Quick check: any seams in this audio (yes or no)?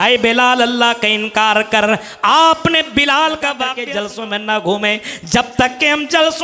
yes